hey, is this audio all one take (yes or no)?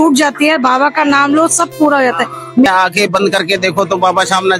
no